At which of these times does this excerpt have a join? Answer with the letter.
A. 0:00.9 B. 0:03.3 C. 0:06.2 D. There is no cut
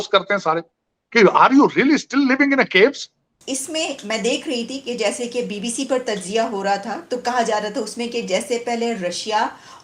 B